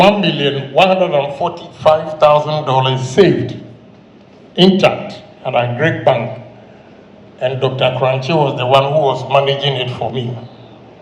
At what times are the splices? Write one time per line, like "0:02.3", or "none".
none